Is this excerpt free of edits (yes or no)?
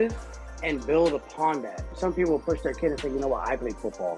no